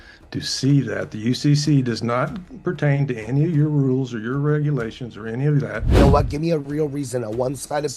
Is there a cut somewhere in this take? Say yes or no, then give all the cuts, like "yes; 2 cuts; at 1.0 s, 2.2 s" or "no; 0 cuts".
yes; 1 cut; at 6.0 s